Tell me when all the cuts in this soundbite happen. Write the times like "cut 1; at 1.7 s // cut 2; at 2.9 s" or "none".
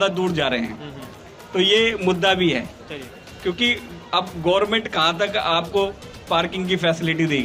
none